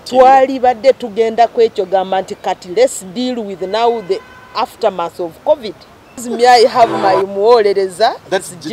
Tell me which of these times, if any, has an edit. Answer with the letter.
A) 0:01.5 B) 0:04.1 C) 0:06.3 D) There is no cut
C